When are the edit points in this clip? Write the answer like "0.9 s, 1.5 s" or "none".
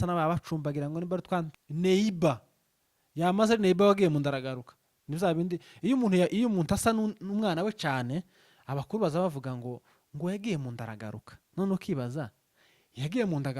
1.5 s